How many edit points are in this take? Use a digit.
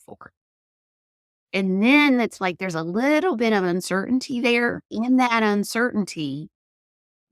1